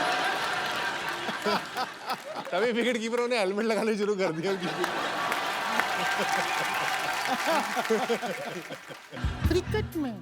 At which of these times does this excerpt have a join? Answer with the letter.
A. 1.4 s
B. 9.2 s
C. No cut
B